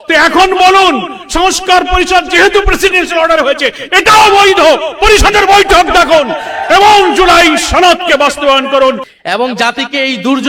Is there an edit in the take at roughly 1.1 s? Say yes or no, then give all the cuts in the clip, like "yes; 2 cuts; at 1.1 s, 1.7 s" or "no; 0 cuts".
no; 1 cut; at 9.1 s